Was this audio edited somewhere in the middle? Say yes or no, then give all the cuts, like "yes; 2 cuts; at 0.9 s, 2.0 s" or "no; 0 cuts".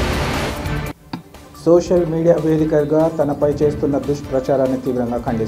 yes; 1 cut; at 0.9 s